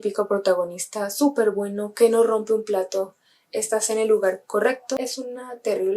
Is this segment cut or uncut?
cut